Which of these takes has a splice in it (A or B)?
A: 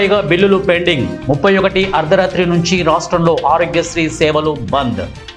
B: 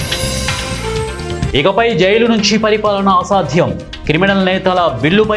B